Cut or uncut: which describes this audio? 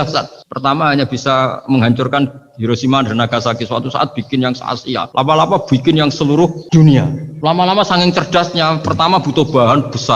cut